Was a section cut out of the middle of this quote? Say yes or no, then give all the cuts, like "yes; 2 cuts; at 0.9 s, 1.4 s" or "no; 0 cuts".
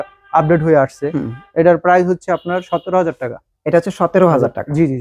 no; 0 cuts